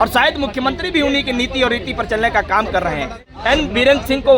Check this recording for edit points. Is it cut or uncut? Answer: cut